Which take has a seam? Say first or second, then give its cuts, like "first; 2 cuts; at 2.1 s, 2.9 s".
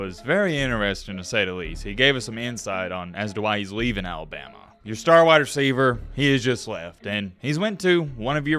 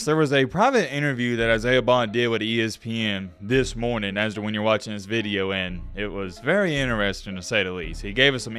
first; 1 cut; at 4.7 s